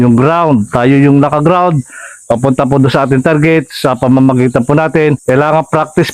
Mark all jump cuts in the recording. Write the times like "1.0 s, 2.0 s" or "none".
5.2 s